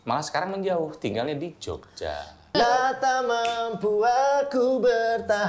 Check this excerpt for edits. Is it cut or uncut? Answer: cut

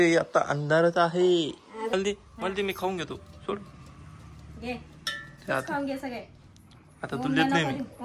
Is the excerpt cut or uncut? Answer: cut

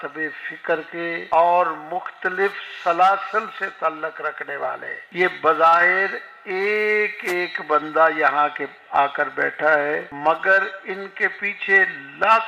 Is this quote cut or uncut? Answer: cut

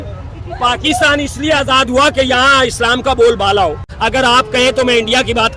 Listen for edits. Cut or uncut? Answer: cut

